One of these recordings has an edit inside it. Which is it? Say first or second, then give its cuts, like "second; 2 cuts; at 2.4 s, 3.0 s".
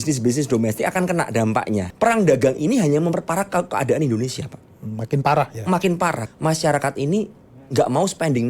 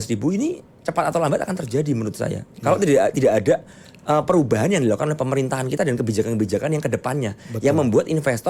first; 2 cuts; at 1.9 s, 6.2 s